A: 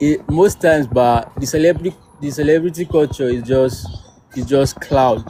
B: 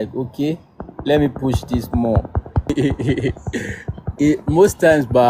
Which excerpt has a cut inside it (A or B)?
B